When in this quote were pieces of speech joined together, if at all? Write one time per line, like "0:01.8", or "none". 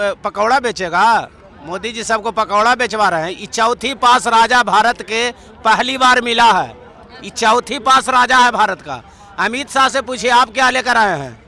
none